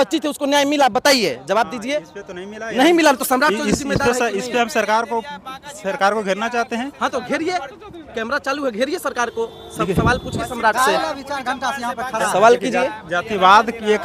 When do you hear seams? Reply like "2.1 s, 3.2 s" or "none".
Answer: none